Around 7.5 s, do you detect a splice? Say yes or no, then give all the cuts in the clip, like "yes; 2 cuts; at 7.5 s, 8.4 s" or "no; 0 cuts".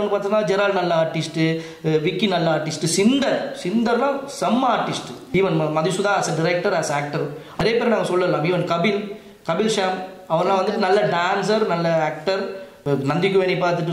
yes; 3 cuts; at 5.2 s, 7.5 s, 12.7 s